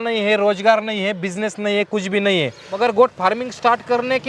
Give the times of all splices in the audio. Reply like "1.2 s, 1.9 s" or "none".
2.6 s